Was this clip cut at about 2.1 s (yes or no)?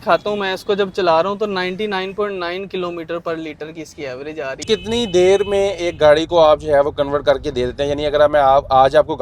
no